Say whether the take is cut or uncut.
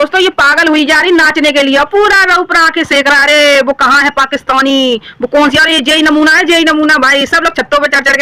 uncut